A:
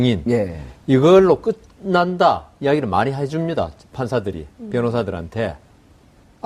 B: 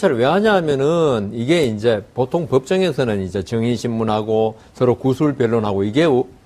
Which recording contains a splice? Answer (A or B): B